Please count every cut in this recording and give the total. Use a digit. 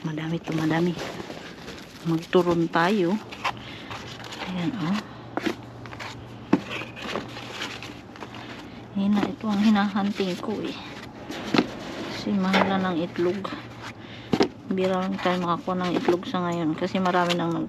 1